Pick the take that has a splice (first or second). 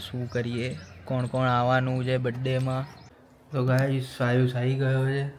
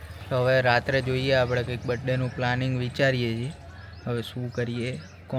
first